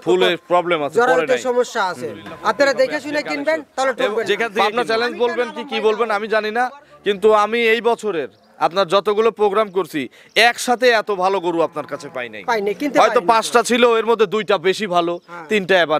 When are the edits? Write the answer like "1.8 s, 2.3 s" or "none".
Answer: 4.5 s